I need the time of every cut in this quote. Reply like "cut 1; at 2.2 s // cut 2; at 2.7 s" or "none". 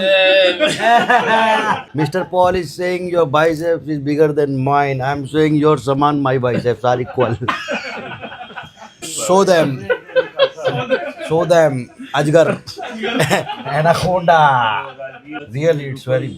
cut 1; at 1.9 s // cut 2; at 8.9 s // cut 3; at 15.4 s